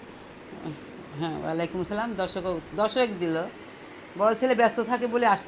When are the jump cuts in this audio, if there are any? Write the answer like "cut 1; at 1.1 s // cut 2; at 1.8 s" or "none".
none

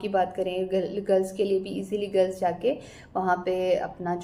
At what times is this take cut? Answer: none

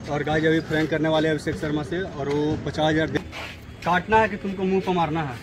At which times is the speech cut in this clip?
cut 1; at 3.2 s

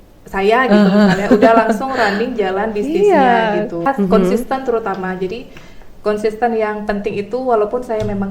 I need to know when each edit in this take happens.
cut 1; at 3.9 s

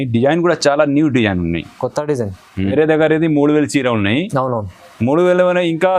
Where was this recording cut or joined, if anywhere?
cut 1; at 2.7 s

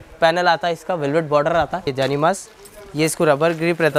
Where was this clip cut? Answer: cut 1; at 1.9 s

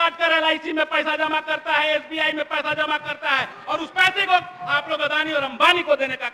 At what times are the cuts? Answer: none

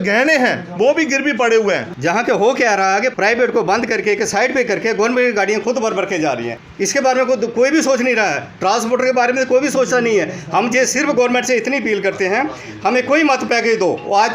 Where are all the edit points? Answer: cut 1; at 1.9 s // cut 2; at 6.6 s

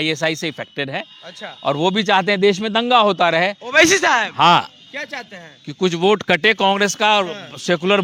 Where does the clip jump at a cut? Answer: none

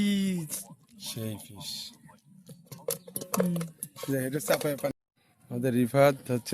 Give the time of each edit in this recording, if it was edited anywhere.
cut 1; at 4.9 s

